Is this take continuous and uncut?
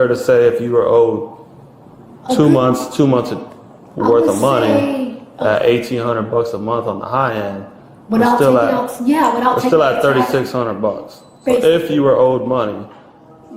yes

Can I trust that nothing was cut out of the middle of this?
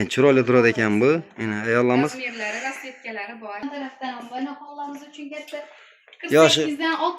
no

